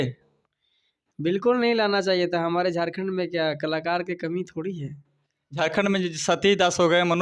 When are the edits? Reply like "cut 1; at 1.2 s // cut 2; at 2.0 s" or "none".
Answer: none